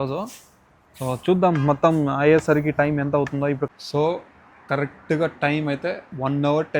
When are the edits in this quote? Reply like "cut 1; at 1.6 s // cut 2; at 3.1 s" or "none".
cut 1; at 3.6 s